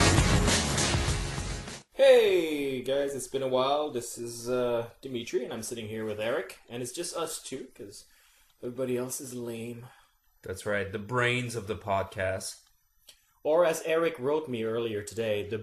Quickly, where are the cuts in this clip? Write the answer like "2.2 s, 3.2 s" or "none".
none